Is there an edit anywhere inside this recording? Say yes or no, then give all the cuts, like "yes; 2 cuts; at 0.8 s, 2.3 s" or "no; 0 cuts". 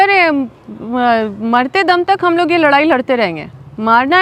no; 0 cuts